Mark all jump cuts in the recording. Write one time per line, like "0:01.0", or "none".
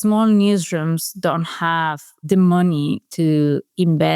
0:02.2